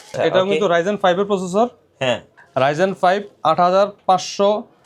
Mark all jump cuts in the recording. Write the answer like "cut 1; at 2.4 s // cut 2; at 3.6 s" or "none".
none